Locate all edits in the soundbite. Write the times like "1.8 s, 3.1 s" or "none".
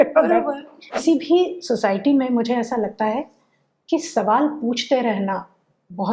1.0 s